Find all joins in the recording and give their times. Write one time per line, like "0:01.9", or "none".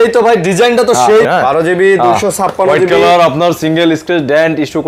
0:01.3